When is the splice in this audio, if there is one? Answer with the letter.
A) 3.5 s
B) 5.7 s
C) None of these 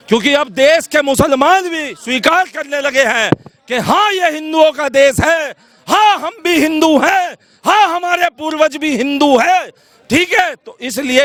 C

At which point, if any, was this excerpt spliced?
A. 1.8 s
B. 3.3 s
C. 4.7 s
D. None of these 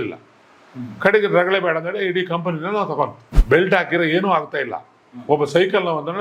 B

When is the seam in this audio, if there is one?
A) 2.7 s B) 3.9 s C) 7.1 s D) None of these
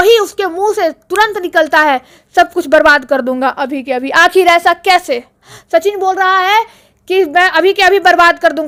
D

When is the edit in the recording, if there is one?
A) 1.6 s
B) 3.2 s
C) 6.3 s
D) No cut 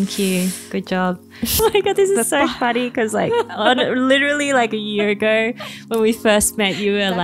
A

